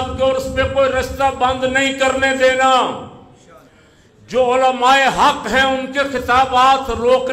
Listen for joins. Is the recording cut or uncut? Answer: uncut